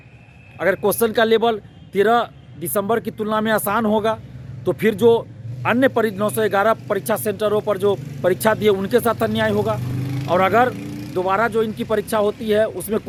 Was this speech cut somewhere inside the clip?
no; 0 cuts

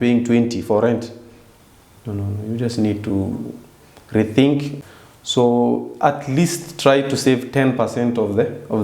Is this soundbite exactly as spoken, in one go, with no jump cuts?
no; 1 cut; at 4.8 s

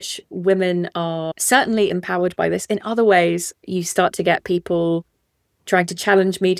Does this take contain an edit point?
yes; 2 cuts; at 1.9 s, 3.6 s

